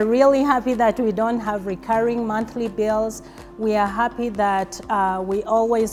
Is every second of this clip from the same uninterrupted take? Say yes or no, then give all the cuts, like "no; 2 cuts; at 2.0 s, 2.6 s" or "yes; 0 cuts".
yes; 0 cuts